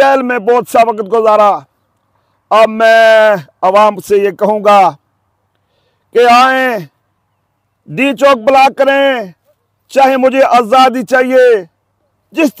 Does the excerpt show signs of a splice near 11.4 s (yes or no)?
no